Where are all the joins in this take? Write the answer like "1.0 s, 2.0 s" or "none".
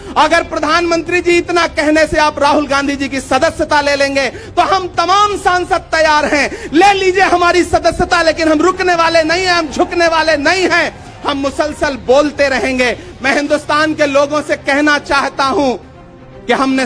none